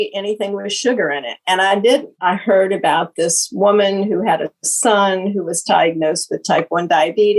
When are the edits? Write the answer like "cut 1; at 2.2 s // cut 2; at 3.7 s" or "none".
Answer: cut 1; at 2.1 s